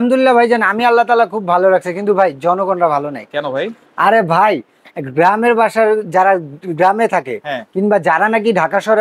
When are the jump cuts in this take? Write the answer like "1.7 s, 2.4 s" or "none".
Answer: none